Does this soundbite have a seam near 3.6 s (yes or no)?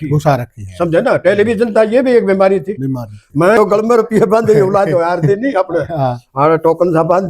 yes